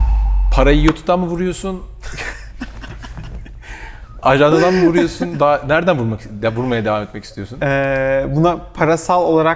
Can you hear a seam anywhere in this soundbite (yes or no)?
no